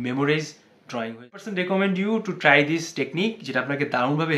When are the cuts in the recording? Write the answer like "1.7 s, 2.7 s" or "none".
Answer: 1.4 s